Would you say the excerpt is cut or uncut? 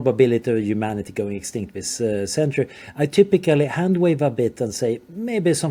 uncut